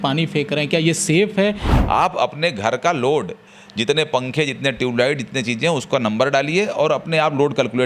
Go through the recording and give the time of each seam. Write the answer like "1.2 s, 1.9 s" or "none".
1.7 s